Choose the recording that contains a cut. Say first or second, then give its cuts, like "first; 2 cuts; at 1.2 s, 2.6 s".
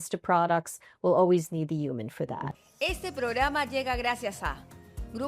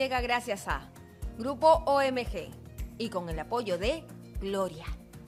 first; 1 cut; at 2.5 s